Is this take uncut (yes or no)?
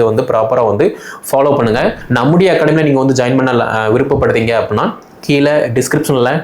no